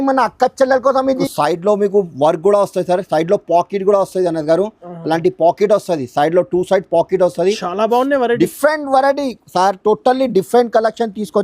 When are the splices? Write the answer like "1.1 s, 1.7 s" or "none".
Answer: 1.2 s